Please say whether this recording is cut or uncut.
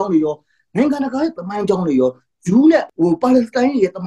cut